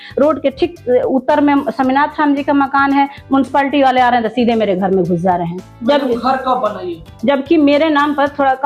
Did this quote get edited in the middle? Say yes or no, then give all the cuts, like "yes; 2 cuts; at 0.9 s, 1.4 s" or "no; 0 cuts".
no; 0 cuts